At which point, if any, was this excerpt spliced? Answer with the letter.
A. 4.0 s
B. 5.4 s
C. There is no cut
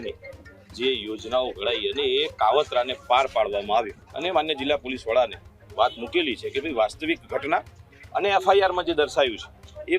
A